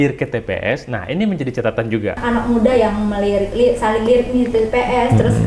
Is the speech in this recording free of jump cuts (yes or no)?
no